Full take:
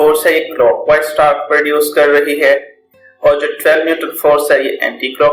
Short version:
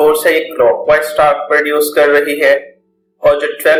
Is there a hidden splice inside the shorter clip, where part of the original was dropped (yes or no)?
no